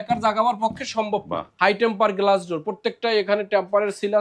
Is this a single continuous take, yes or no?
no